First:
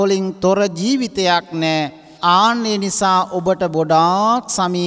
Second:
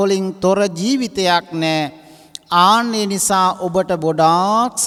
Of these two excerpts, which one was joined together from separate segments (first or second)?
first